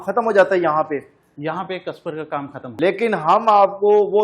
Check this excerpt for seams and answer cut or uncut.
cut